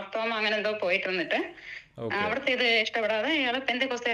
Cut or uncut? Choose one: uncut